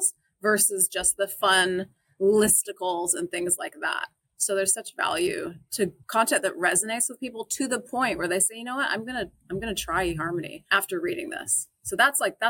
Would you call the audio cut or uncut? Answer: cut